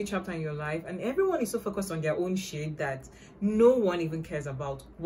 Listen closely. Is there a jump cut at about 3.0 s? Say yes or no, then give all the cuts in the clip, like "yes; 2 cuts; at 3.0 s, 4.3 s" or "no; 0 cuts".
no; 0 cuts